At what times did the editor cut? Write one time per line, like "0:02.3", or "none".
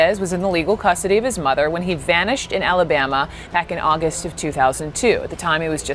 none